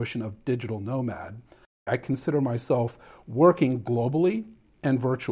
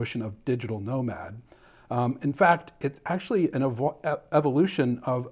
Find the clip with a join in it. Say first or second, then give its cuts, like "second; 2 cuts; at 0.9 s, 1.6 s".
first; 1 cut; at 1.8 s